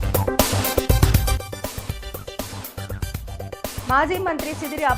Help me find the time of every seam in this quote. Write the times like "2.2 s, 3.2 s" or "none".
3.5 s